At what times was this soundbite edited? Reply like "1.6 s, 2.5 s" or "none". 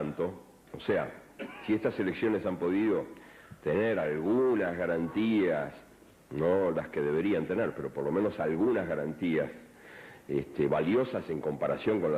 11.2 s